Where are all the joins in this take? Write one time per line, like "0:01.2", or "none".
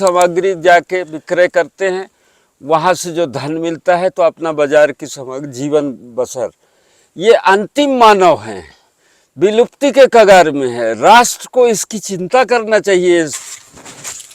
0:13.4